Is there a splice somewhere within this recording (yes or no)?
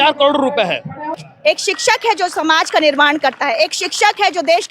yes